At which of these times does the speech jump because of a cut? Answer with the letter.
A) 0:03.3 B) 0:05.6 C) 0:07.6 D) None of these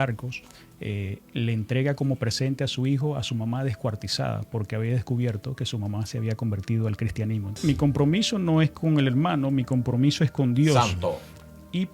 C